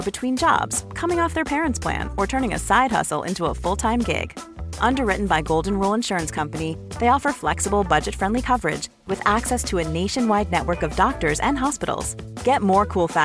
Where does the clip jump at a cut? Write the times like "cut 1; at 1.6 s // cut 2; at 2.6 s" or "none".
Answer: none